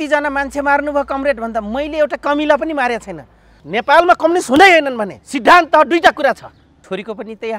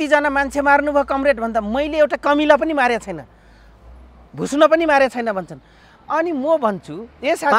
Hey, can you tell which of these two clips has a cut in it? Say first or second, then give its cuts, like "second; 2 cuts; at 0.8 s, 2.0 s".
first; 2 cuts; at 3.6 s, 6.8 s